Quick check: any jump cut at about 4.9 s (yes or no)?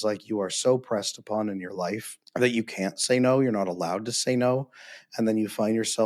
no